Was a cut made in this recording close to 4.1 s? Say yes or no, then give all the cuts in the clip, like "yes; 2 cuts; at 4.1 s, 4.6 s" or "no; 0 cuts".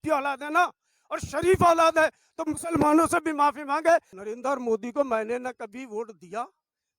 yes; 1 cut; at 4.1 s